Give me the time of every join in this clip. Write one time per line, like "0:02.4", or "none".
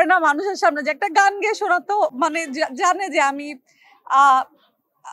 none